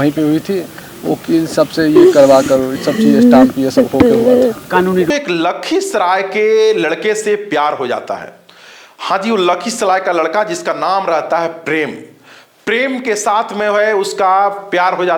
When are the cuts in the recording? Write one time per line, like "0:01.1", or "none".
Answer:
0:05.1